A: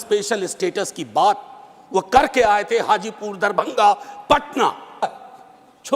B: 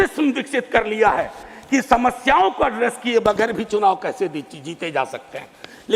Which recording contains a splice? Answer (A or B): A